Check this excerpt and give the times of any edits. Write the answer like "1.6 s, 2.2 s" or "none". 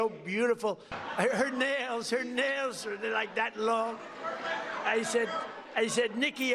0.9 s